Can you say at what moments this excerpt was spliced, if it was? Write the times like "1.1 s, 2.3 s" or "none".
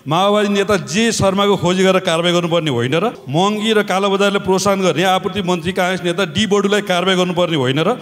3.2 s